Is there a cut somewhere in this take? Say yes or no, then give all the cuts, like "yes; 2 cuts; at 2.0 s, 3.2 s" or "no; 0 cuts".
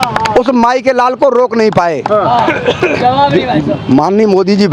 no; 0 cuts